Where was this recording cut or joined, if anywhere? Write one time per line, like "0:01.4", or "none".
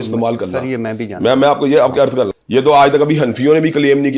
0:02.4